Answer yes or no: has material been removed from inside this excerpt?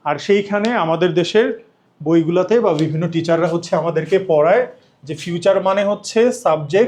no